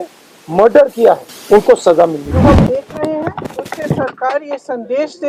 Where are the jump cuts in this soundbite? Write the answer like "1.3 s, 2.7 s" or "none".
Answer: 1.3 s, 2.5 s